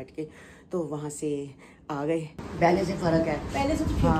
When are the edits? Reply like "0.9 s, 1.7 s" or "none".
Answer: 2.4 s